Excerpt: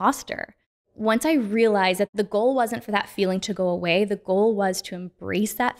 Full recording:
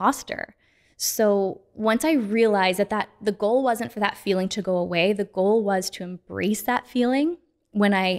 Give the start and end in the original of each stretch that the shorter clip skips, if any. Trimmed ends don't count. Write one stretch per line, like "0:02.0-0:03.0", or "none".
0:00.9-0:01.7
0:02.9-0:03.2